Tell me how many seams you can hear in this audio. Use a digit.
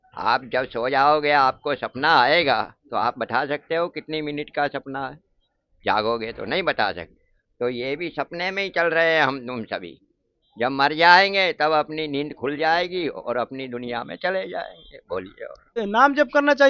1